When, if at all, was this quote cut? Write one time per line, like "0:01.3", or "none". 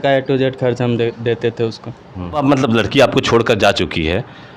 0:02.4